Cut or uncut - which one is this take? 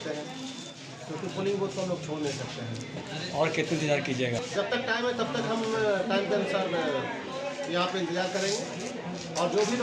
uncut